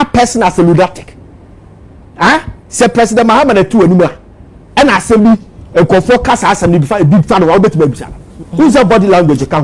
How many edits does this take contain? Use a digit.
1